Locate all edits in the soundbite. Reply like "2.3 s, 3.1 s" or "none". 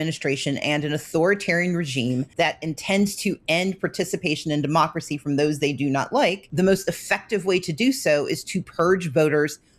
2.3 s, 6.4 s